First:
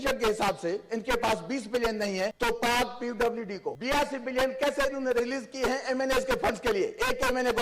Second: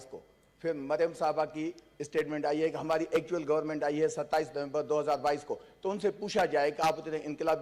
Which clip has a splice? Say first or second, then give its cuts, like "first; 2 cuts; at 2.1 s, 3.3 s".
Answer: first; 2 cuts; at 2.3 s, 3.7 s